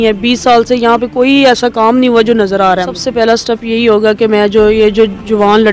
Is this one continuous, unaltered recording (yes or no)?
no